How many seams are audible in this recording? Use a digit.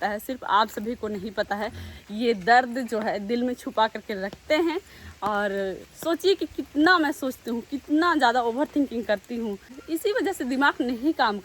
1